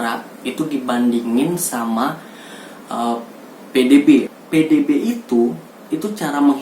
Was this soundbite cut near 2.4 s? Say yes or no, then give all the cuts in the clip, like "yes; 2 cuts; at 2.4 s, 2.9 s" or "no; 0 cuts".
no; 1 cut; at 4.4 s